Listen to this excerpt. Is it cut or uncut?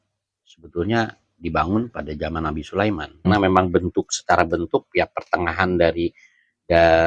cut